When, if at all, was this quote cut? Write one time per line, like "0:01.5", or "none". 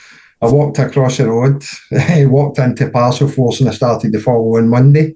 none